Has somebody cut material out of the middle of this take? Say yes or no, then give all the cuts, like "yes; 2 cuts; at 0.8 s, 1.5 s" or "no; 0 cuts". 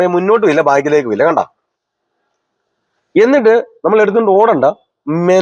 no; 0 cuts